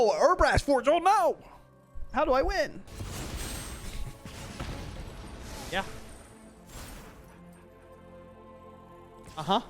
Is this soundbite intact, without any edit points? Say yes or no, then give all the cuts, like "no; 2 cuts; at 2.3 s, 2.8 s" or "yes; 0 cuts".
no; 1 cut; at 2.9 s